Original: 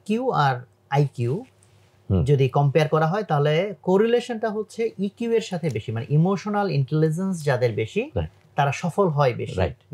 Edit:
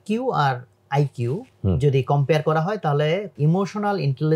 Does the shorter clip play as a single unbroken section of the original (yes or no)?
no